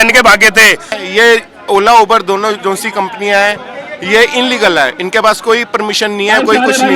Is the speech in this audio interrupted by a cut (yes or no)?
yes